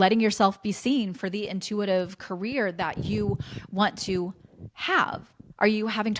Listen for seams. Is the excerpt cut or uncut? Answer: uncut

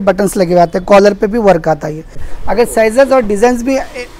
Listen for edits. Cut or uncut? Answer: cut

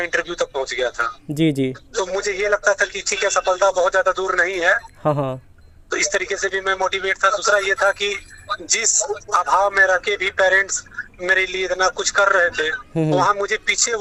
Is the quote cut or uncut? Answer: uncut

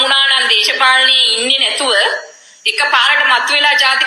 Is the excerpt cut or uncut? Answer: uncut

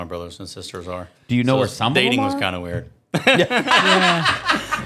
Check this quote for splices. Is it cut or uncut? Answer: uncut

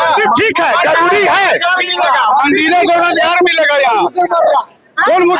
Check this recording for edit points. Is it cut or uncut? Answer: uncut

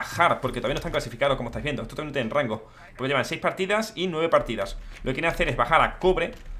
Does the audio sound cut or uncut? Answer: uncut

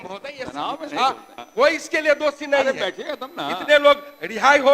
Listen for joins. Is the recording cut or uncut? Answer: cut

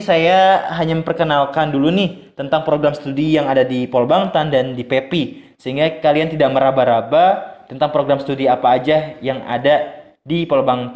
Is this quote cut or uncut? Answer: uncut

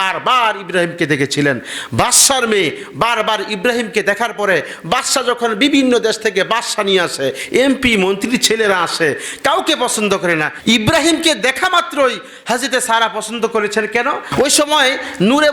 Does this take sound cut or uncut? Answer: cut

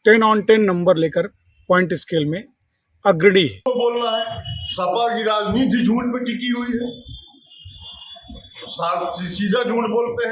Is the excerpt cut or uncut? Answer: cut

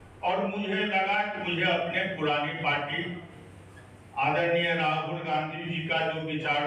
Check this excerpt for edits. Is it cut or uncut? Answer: uncut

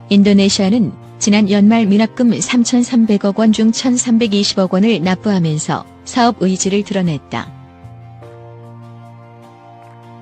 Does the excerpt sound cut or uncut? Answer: uncut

